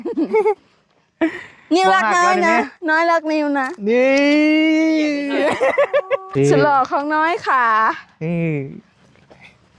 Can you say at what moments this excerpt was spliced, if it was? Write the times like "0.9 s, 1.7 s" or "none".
6.3 s